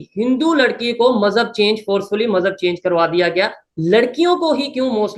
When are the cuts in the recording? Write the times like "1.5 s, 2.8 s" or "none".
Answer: none